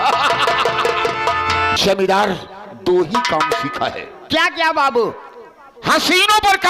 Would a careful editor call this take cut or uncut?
cut